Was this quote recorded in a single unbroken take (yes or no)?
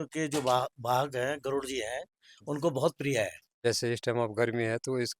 no